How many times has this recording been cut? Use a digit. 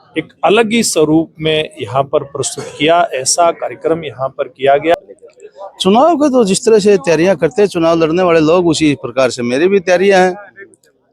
1